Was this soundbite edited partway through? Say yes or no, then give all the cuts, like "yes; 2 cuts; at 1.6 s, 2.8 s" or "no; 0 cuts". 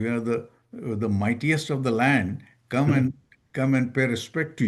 no; 0 cuts